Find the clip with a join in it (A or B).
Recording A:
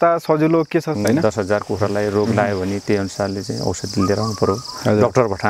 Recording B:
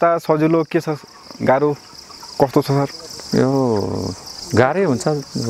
A